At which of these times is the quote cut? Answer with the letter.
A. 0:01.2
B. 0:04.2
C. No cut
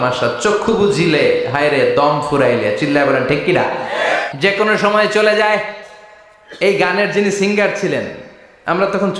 B